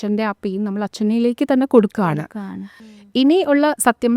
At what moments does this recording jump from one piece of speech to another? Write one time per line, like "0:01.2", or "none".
0:02.8